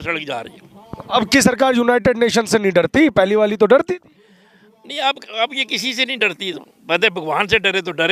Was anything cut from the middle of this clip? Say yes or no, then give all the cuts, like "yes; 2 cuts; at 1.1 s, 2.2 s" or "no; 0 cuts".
no; 0 cuts